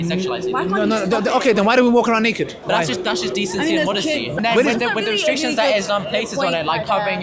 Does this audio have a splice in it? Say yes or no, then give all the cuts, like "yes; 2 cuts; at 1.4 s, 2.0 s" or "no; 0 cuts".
yes; 2 cuts; at 2.6 s, 4.4 s